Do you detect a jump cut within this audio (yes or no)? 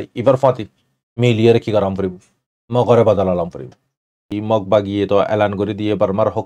yes